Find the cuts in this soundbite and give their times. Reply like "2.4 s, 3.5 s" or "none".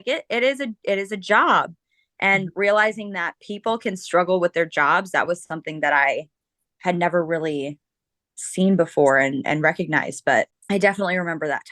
10.6 s